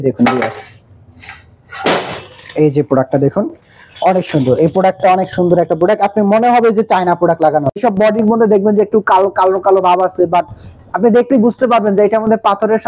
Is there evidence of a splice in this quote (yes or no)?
yes